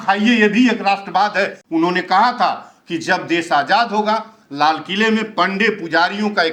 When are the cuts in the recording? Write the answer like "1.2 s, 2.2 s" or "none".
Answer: 1.6 s